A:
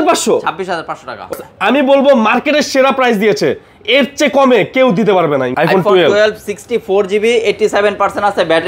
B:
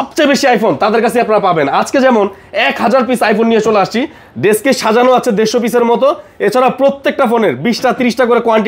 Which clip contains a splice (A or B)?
A